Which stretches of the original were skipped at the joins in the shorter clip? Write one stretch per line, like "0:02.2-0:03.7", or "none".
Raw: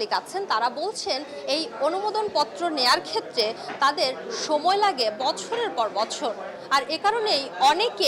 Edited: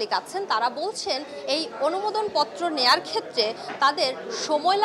none

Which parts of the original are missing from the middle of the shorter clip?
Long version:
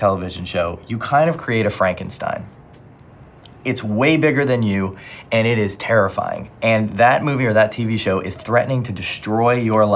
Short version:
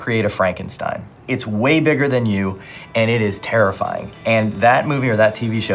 0:02.5-0:03.5

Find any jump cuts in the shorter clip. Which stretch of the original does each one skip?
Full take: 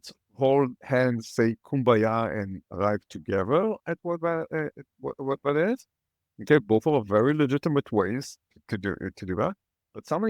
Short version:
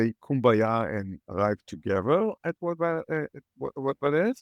none

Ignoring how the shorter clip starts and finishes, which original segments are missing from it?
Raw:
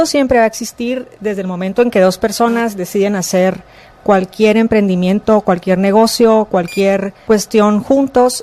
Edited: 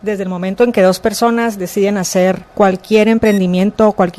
0:03.6-0:03.9

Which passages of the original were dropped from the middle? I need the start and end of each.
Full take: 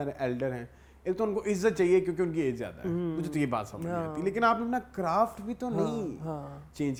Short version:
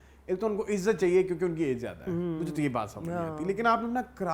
none

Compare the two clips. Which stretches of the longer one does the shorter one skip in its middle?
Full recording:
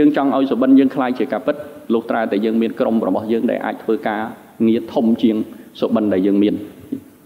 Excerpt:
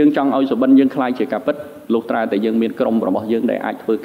none

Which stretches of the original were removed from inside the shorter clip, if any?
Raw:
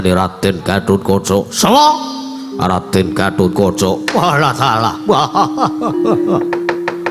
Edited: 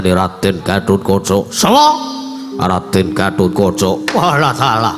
none

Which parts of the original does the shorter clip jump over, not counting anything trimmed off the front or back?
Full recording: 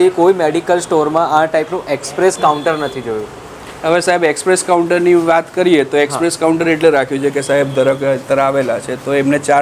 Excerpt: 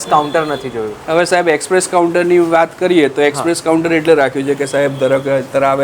0:03.2-0:03.7

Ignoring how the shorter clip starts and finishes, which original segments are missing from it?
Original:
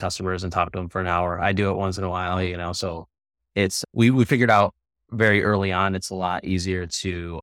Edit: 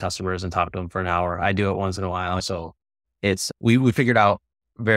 0:02.4-0:02.7

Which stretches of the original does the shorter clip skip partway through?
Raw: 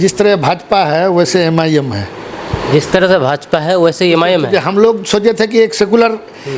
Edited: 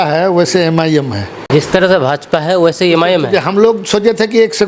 0:02.1-0:02.5

